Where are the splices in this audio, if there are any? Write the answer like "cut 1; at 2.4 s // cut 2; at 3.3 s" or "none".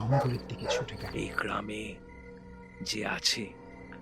cut 1; at 1.0 s